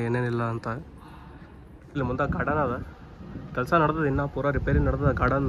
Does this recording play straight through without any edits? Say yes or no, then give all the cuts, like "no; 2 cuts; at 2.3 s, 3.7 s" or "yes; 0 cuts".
no; 1 cut; at 1.9 s